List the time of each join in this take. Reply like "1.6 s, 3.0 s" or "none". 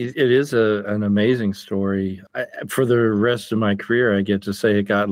2.2 s